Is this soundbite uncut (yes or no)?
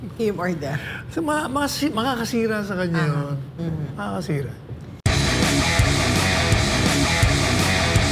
yes